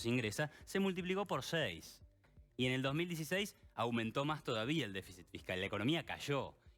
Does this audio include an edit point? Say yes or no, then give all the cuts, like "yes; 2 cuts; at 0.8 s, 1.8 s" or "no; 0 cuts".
no; 0 cuts